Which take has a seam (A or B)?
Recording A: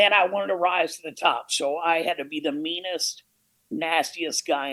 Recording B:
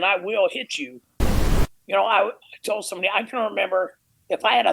B